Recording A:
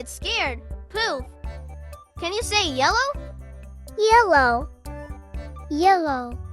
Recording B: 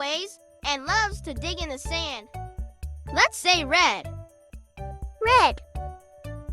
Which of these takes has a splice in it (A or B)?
B